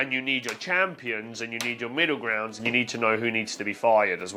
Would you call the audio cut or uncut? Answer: uncut